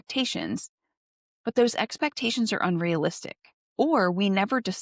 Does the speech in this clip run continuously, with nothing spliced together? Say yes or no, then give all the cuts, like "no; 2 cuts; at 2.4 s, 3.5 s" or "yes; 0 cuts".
yes; 0 cuts